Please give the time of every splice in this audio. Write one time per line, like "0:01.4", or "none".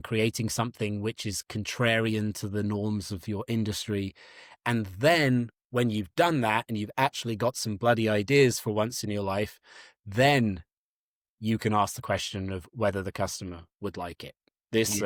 none

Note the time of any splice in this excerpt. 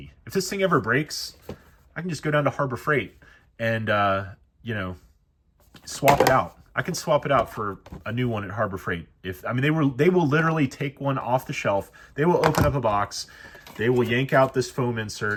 none

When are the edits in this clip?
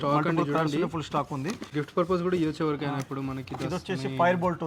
none

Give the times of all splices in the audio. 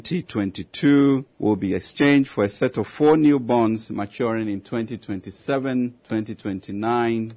0:01.3
0:06.0

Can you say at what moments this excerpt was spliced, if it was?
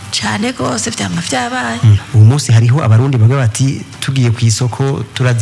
0:02.0

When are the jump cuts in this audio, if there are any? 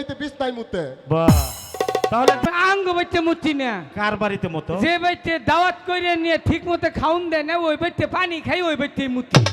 0:02.5

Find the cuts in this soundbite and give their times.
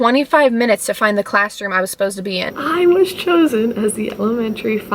0:02.5

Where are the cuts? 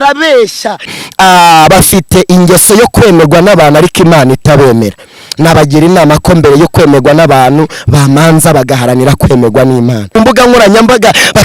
0:01.0
0:10.1

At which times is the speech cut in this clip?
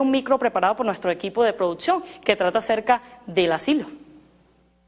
none

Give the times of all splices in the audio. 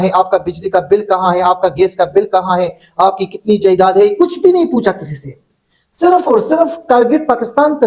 none

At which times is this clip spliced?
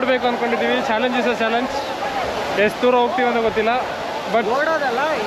none

